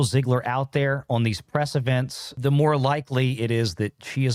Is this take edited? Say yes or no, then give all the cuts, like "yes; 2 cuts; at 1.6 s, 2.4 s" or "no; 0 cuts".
no; 0 cuts